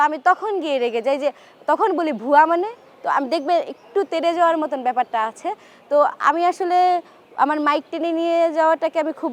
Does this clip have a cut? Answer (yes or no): no